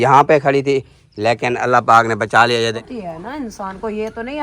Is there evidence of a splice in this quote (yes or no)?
yes